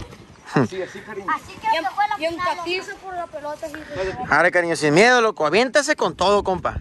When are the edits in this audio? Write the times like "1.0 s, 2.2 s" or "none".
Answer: none

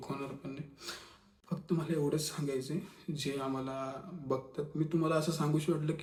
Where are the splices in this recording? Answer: none

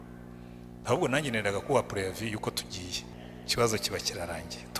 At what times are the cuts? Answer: 3.1 s

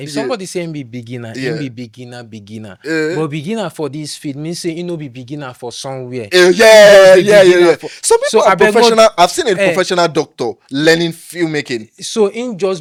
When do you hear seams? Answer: none

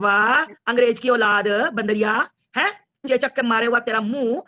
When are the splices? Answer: none

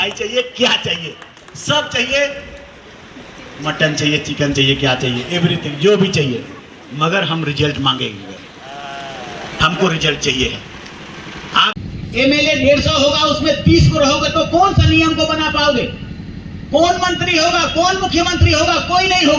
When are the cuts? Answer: 11.7 s

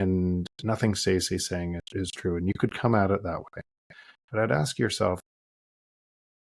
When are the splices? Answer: 1.8 s

